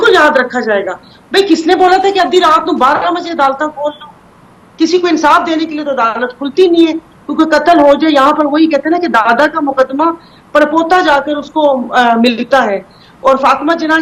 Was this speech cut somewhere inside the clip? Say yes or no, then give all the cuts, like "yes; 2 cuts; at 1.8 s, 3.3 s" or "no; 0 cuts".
no; 0 cuts